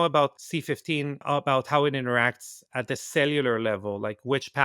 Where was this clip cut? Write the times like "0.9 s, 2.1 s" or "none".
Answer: 1.0 s